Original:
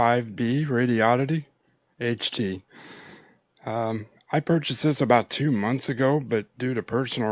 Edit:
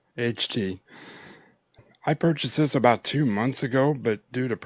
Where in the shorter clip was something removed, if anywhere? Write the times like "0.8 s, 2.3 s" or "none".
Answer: 1.8 s